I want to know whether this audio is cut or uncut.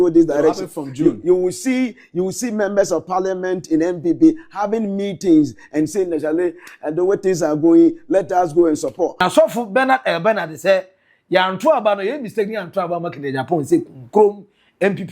cut